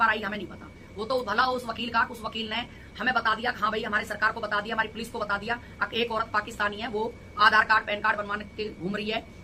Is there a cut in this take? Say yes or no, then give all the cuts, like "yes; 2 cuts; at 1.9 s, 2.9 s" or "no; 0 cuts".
no; 0 cuts